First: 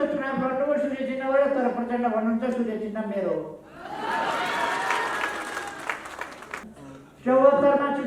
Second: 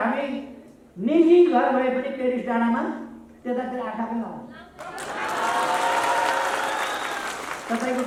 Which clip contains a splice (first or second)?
first